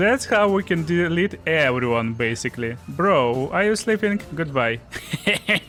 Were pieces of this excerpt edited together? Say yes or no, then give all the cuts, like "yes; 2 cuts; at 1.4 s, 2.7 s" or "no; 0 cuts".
no; 0 cuts